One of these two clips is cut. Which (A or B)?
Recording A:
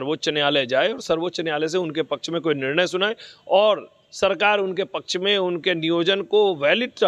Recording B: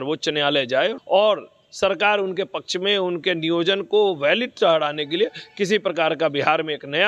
B